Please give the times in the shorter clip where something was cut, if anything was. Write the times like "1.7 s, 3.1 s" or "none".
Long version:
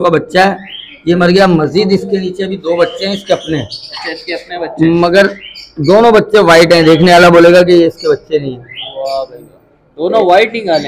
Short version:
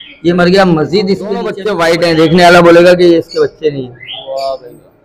1.6 s